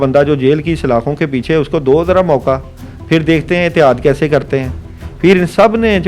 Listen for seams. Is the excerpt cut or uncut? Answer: uncut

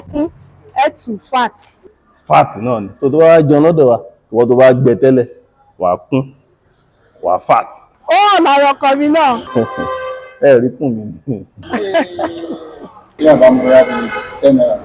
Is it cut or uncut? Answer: uncut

